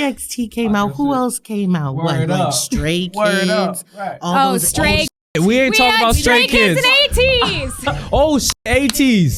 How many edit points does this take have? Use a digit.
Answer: 0